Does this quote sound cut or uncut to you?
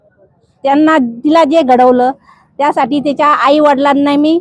uncut